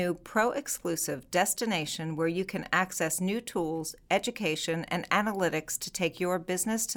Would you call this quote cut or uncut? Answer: uncut